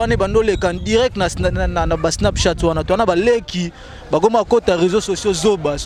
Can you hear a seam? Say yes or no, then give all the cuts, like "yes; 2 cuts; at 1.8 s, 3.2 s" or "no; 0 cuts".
no; 0 cuts